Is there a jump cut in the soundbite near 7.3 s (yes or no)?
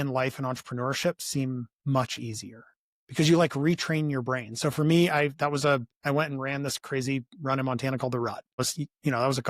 no